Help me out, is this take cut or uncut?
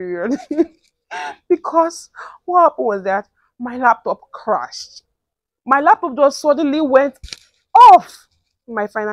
uncut